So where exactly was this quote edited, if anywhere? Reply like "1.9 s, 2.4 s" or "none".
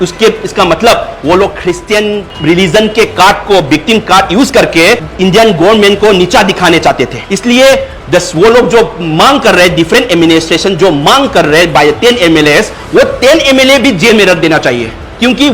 2.3 s, 7.2 s, 7.9 s